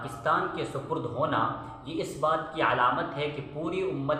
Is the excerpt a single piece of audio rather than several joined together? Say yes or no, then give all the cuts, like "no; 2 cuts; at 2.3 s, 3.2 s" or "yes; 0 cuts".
yes; 0 cuts